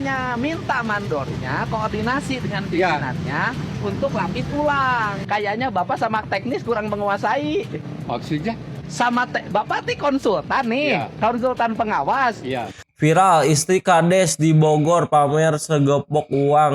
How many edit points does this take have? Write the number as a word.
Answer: one